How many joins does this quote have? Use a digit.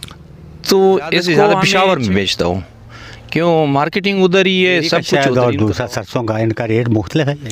2